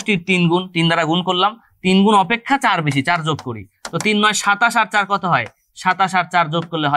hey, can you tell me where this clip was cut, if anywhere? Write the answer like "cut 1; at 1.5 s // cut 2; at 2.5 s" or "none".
none